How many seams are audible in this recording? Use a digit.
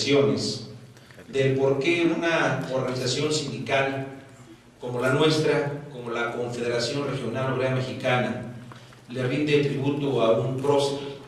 0